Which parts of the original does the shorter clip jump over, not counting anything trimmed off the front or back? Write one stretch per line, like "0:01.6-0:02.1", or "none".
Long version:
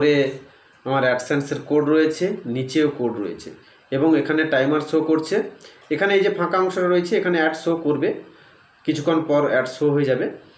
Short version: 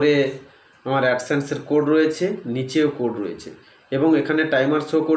none